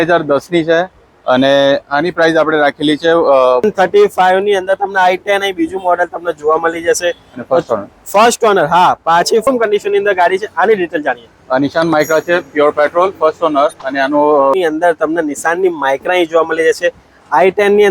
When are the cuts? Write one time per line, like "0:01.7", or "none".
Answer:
0:03.6
0:09.5
0:14.5